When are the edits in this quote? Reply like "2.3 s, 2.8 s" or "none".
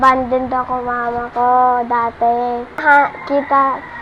2.8 s